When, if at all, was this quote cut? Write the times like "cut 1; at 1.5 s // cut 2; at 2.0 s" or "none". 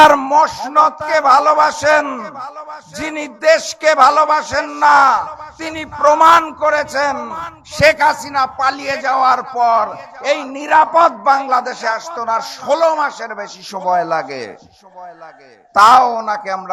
none